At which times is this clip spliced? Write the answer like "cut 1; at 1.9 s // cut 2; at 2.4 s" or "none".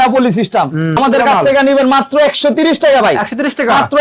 cut 1; at 0.9 s